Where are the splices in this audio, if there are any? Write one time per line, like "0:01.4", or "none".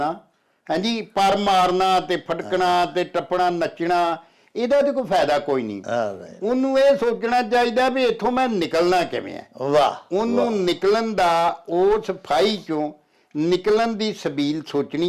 none

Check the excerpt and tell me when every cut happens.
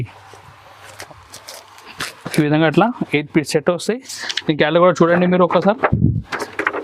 0:00.9

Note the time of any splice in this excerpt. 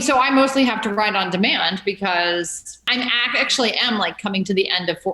0:00.9
0:02.9

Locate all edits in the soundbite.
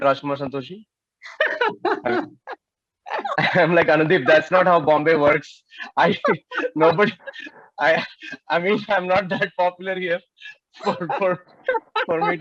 none

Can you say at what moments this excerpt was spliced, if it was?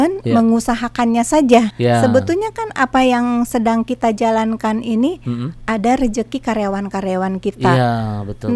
0:01.7

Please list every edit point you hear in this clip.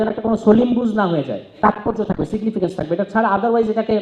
0:01.5

